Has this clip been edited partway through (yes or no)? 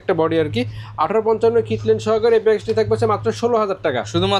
no